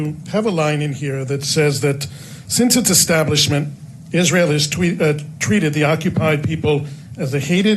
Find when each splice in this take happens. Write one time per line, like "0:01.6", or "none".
none